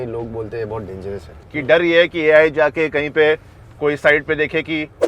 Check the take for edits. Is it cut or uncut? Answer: cut